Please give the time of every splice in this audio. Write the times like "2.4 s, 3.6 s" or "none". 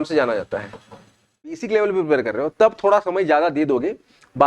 1.6 s